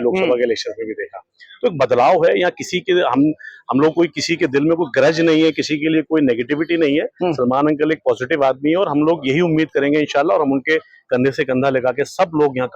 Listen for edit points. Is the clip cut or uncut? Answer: uncut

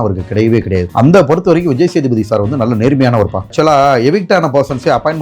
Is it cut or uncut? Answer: cut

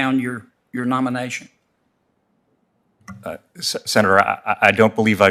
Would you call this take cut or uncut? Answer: uncut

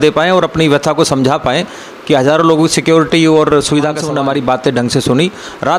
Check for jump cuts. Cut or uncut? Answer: cut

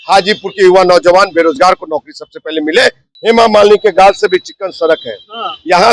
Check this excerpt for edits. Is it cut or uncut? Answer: cut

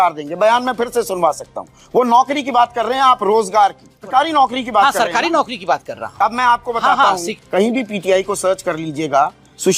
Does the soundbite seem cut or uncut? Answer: cut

